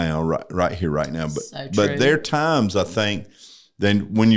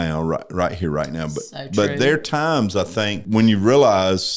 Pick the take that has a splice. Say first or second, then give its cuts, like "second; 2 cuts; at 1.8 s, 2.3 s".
second; 1 cut; at 3.2 s